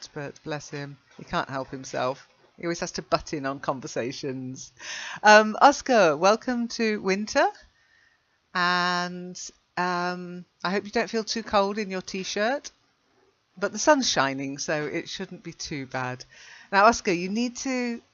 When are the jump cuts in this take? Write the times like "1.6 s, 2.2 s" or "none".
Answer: 6.4 s